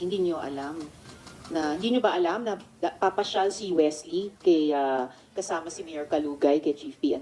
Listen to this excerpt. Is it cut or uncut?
uncut